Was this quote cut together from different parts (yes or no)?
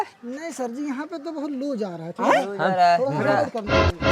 no